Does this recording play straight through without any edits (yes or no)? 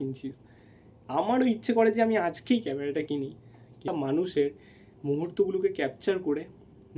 no